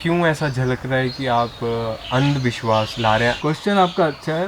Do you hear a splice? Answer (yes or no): yes